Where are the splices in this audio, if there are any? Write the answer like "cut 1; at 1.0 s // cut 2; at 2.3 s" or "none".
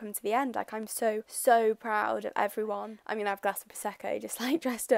cut 1; at 3.0 s